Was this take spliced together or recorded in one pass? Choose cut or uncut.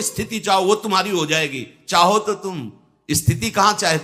uncut